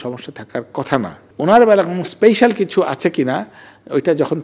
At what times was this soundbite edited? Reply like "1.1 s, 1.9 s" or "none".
1.2 s